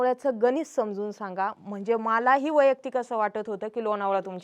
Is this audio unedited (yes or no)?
yes